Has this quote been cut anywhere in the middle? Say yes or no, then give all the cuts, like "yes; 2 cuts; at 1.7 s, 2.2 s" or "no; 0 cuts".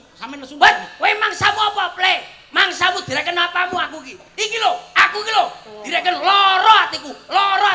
no; 0 cuts